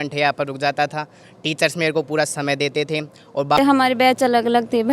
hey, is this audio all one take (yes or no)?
no